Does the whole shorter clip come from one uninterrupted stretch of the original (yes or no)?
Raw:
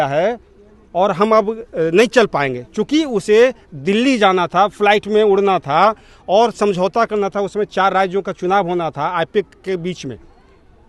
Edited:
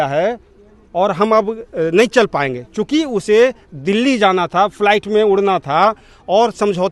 yes